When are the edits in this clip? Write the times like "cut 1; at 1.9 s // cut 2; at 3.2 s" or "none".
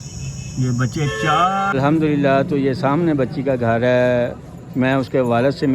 cut 1; at 1.7 s